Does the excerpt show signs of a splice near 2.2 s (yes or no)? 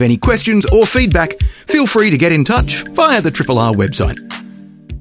no